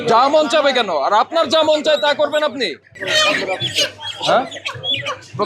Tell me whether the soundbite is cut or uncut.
uncut